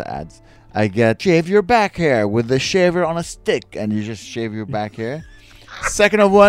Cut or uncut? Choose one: cut